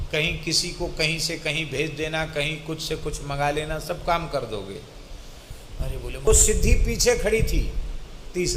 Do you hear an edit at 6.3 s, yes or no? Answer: yes